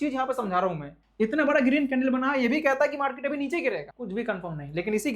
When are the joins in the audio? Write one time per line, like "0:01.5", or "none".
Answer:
0:01.0
0:03.9